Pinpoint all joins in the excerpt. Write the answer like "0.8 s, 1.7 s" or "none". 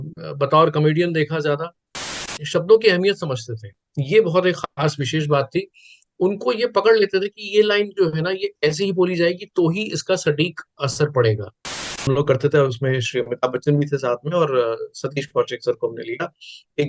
2.3 s, 11.9 s